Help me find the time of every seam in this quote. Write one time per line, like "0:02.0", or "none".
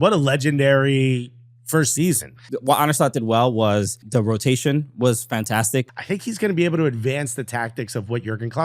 0:02.5
0:04.0
0:05.9